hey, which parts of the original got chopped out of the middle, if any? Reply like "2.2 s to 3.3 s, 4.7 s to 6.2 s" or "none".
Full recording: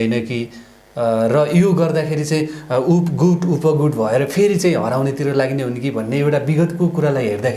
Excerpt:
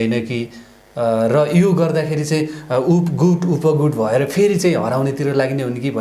none